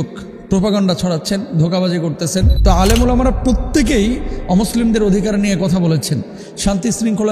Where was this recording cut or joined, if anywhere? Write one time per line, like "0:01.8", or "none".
0:02.7